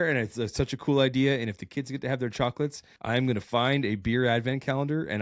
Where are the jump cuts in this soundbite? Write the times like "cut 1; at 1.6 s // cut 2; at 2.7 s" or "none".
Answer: cut 1; at 2.9 s